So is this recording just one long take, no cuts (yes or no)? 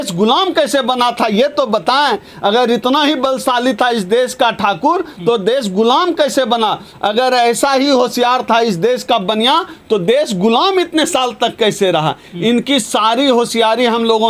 yes